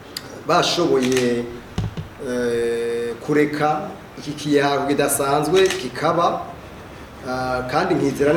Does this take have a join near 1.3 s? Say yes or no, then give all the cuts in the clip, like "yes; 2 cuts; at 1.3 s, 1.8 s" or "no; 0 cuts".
no; 0 cuts